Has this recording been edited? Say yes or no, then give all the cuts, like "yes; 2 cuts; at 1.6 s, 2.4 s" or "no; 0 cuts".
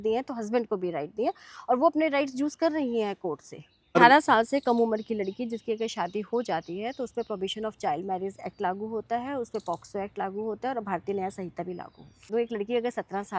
yes; 2 cuts; at 4.0 s, 12.2 s